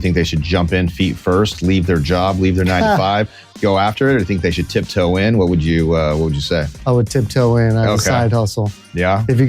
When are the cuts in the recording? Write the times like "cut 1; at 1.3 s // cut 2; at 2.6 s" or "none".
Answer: cut 1; at 6.7 s